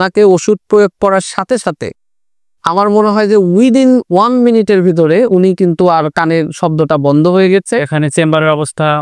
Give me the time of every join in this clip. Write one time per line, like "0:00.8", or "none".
0:07.8